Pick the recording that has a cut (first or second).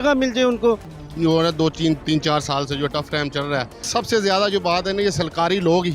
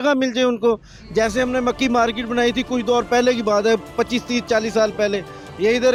first